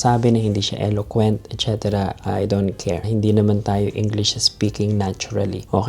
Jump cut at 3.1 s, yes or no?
yes